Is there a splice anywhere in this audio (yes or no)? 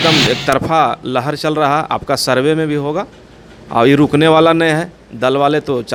no